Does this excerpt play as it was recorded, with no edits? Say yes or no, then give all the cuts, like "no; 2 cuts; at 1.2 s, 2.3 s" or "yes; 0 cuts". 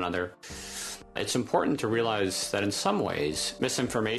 no; 1 cut; at 1.2 s